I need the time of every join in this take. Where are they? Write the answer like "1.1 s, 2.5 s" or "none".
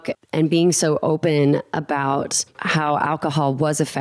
2.6 s